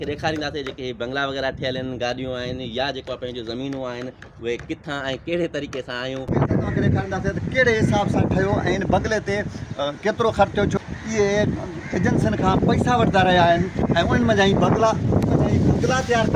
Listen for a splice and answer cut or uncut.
cut